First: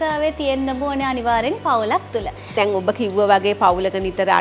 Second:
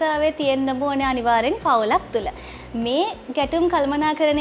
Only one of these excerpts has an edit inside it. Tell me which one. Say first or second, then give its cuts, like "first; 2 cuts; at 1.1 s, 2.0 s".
first; 1 cut; at 2.5 s